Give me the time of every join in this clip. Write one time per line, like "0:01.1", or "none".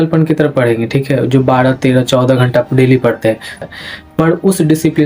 0:03.6